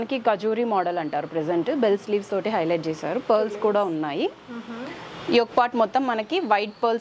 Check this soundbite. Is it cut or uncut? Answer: uncut